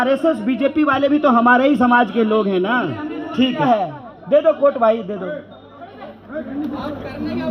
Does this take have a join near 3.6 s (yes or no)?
yes